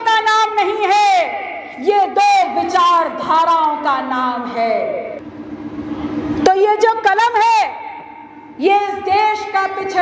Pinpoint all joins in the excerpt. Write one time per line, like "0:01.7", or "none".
0:05.2